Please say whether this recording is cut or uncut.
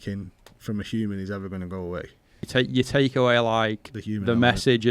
cut